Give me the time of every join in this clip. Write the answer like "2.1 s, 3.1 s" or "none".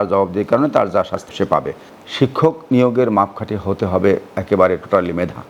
1.4 s